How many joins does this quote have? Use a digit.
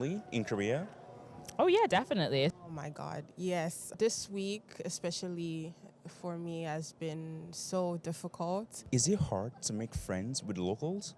2